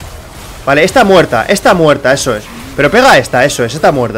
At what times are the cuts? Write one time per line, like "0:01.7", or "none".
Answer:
none